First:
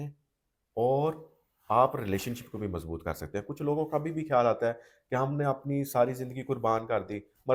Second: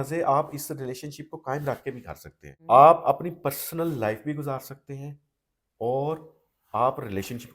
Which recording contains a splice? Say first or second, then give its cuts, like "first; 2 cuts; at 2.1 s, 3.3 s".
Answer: second; 1 cut; at 2.6 s